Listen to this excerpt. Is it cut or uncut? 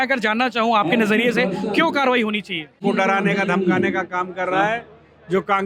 cut